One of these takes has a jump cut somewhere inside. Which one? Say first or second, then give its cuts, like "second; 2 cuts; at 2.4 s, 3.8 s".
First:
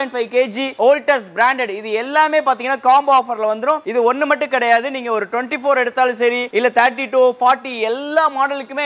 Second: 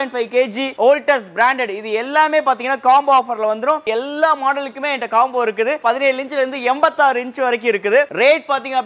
second; 3 cuts; at 3.8 s, 5.8 s, 8.1 s